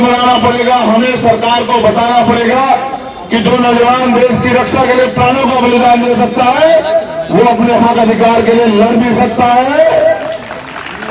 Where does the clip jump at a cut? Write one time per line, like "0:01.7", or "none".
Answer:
none